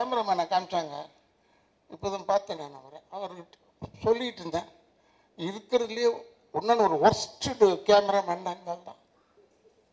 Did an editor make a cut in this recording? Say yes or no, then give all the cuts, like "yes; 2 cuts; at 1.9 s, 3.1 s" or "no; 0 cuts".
no; 0 cuts